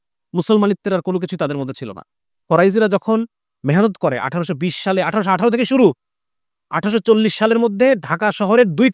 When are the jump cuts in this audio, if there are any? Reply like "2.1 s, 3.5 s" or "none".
2.4 s